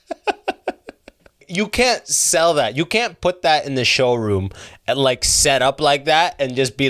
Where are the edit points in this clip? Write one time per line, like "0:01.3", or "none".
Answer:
0:01.5